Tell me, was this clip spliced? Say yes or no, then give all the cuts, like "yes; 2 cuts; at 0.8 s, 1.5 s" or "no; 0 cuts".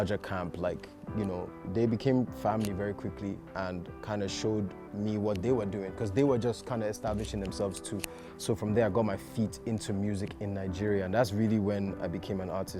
no; 0 cuts